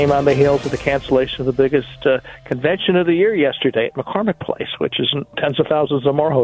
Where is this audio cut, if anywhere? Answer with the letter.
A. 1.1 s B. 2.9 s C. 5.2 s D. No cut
C